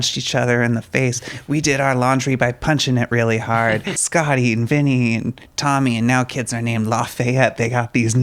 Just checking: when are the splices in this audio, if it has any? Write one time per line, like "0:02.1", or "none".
0:04.0